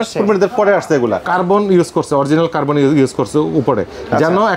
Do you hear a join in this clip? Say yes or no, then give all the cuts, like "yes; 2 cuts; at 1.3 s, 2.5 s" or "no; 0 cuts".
yes; 1 cut; at 1.2 s